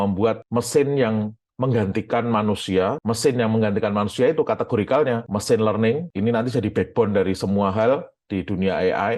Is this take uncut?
yes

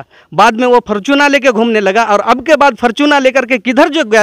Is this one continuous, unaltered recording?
yes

